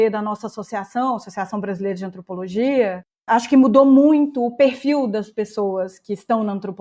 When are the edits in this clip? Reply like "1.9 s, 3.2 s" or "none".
3.3 s